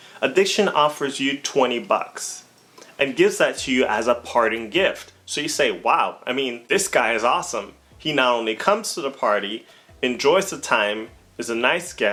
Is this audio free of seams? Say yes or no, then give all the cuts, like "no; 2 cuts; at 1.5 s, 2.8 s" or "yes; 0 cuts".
yes; 0 cuts